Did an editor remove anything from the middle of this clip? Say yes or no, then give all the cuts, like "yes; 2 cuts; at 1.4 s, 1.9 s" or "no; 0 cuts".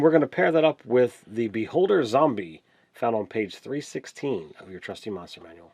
no; 0 cuts